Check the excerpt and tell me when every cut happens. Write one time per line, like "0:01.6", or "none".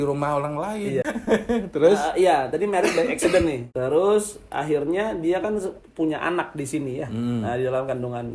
0:01.0
0:03.7